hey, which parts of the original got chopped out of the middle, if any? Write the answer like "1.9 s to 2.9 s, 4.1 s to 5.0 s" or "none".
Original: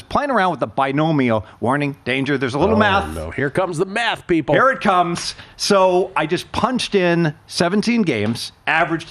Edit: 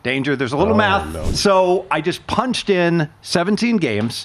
3.2 s to 5.5 s